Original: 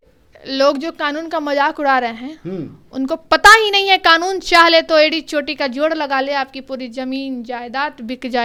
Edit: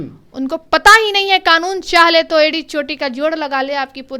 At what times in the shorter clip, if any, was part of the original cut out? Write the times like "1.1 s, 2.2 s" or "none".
none